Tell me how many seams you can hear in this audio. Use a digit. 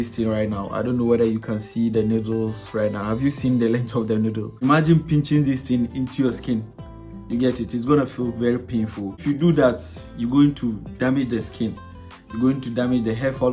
2